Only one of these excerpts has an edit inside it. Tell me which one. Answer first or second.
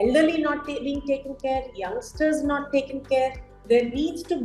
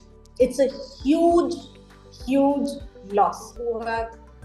second